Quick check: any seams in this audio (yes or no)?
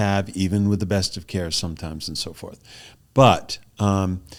no